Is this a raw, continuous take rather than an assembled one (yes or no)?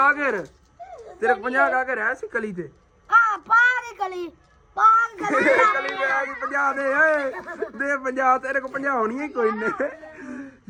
yes